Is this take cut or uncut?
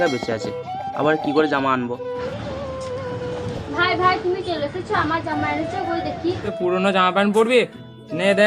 cut